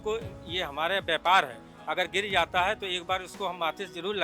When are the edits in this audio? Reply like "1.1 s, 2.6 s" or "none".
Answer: none